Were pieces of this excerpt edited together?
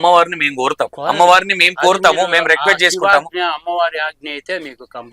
yes; 1 cut; at 1.0 s

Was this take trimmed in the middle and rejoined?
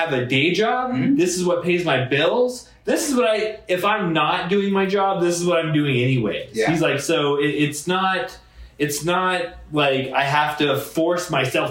no; 0 cuts

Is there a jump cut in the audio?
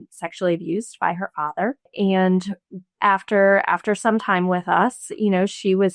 yes; 1 cut; at 1.9 s

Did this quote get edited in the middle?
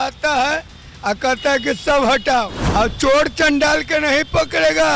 yes; 1 cut; at 2.6 s

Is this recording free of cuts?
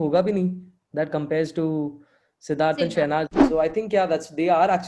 no; 1 cut; at 3.4 s

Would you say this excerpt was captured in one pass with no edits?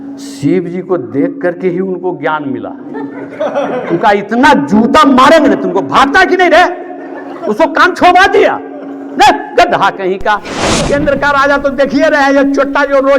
no; 1 cut; at 10.8 s

